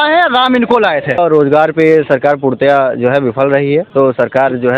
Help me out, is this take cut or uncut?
cut